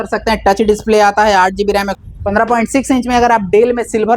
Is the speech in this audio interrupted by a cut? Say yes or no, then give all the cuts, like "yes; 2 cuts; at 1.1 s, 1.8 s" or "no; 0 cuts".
yes; 1 cut; at 2.0 s